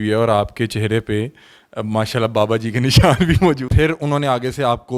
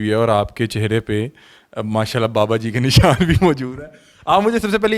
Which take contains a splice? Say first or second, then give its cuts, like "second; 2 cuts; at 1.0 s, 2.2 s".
first; 1 cut; at 3.7 s